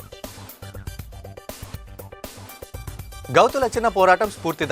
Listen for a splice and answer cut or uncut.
cut